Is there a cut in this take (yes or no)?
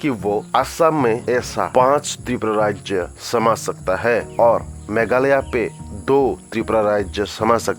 no